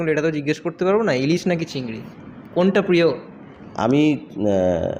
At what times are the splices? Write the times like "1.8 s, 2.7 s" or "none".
none